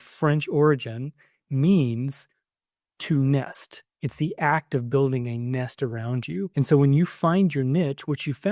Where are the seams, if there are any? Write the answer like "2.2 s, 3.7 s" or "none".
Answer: 6.5 s